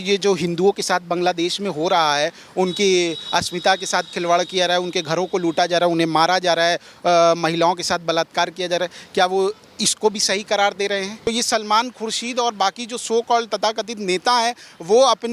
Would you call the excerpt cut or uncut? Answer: cut